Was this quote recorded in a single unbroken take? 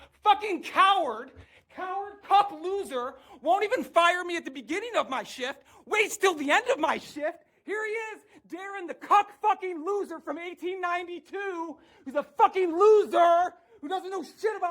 no; 2 cuts; at 7.6 s, 13.6 s

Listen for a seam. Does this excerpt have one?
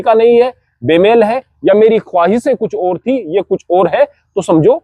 no; 0 cuts

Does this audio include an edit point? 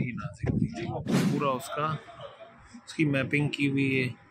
yes; 1 cut; at 1.2 s

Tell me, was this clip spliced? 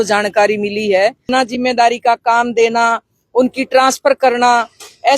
yes; 1 cut; at 1.2 s

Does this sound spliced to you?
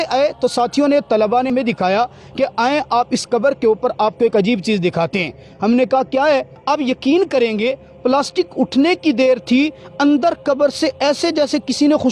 yes; 2 cuts; at 1.5 s, 6.5 s

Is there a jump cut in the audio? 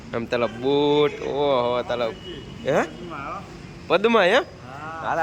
no; 0 cuts

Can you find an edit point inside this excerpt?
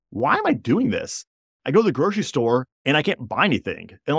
yes; 1 cut; at 2.7 s

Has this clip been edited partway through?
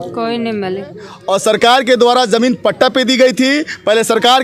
yes; 1 cut; at 1.1 s

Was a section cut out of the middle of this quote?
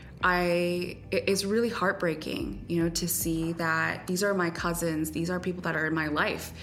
no; 0 cuts

